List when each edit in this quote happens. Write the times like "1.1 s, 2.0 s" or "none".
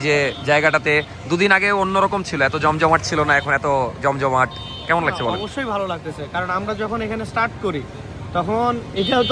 none